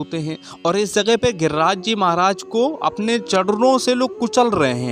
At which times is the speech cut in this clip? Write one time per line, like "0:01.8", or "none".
0:03.2